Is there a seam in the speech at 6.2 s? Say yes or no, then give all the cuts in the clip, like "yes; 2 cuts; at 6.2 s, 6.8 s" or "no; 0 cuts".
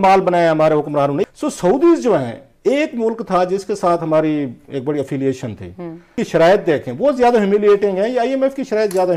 yes; 2 cuts; at 1.3 s, 6.2 s